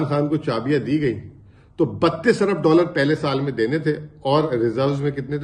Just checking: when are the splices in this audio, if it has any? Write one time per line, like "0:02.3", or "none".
none